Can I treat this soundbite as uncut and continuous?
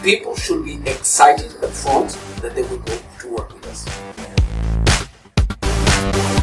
yes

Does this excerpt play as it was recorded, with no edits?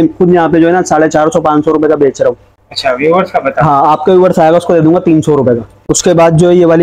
yes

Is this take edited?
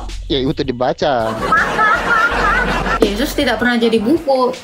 yes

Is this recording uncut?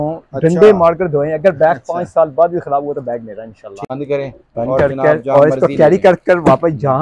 no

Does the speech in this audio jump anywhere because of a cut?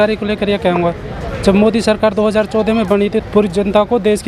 yes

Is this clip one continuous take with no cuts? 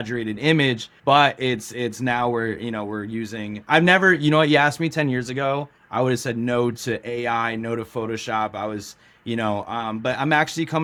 yes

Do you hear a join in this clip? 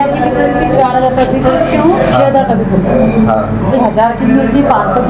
no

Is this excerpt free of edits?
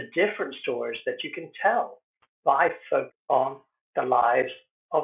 no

